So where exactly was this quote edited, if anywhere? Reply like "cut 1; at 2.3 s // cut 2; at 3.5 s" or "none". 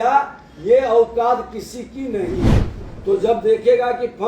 cut 1; at 2.7 s